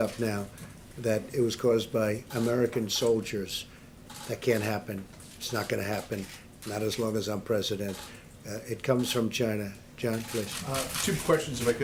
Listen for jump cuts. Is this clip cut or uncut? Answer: uncut